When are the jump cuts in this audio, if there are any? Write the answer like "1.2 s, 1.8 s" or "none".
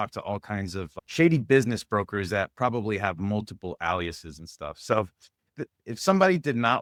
none